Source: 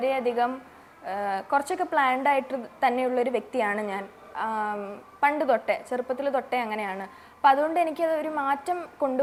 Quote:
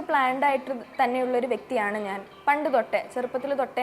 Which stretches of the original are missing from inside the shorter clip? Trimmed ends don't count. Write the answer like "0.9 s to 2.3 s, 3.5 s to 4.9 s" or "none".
4.1 s to 5.0 s